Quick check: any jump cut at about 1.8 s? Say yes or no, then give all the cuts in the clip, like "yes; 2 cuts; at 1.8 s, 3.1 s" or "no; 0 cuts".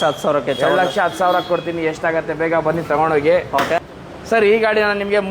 no; 1 cut; at 3.9 s